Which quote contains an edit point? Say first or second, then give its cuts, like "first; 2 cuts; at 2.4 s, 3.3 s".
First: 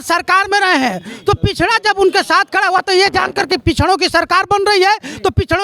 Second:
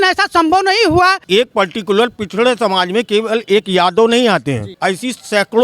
second; 2 cuts; at 1.2 s, 4.7 s